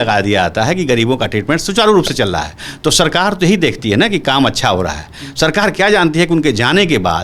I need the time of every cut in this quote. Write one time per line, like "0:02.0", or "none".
none